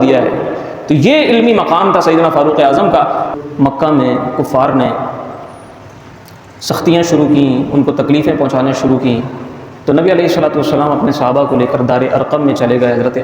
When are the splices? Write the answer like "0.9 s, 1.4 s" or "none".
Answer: 3.4 s